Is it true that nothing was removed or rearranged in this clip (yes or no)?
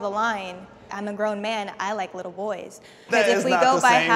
no